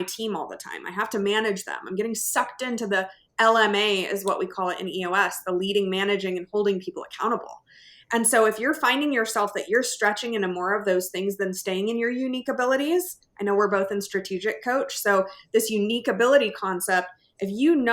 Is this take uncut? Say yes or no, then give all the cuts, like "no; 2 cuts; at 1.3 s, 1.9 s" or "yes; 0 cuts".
yes; 0 cuts